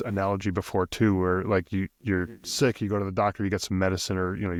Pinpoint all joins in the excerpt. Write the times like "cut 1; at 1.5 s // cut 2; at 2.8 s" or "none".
none

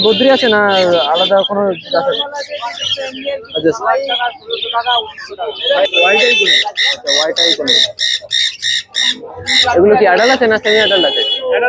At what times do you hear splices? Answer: cut 1; at 5.9 s

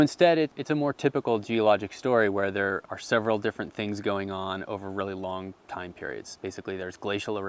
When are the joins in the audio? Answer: cut 1; at 6.1 s

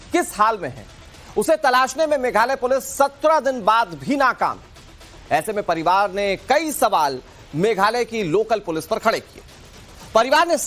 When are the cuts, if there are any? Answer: cut 1; at 5.9 s

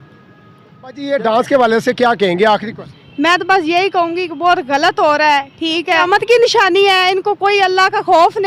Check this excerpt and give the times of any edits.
cut 1; at 1.0 s // cut 2; at 6.0 s

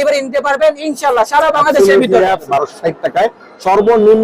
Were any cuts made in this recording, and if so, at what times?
cut 1; at 2.4 s

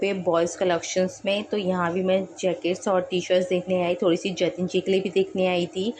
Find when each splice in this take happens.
none

